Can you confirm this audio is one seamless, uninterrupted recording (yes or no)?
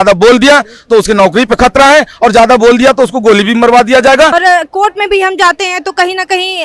no